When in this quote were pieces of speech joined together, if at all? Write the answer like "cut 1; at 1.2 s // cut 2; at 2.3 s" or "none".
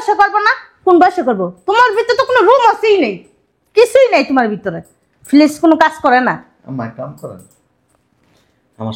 none

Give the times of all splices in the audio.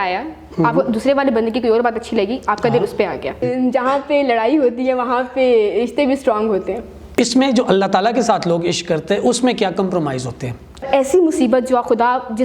cut 1; at 3.4 s // cut 2; at 7.2 s // cut 3; at 10.9 s

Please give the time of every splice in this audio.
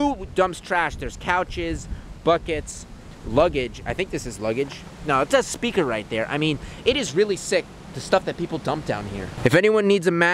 none

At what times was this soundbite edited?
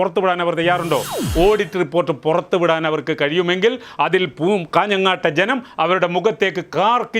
cut 1; at 1.2 s

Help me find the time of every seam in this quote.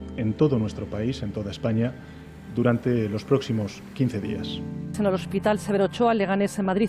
cut 1; at 4.9 s

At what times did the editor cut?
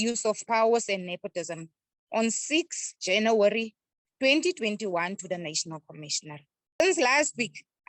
cut 1; at 6.8 s

